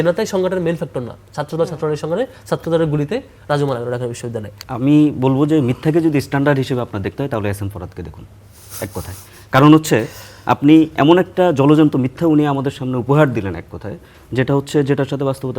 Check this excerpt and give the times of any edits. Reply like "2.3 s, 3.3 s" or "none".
4.6 s

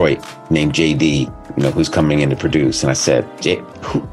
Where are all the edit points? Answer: 1.4 s, 3.3 s

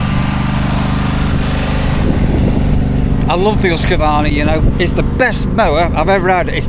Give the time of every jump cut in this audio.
none

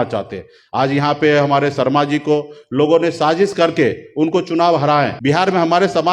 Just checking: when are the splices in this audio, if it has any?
5.1 s

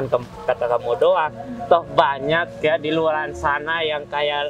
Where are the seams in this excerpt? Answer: none

